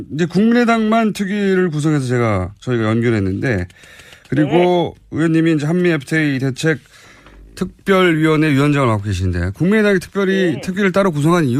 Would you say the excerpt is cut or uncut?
uncut